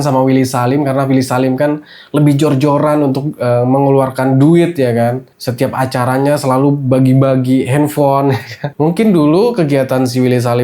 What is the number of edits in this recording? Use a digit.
0